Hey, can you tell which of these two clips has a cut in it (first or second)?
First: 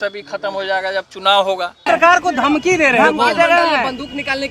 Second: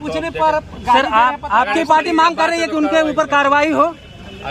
first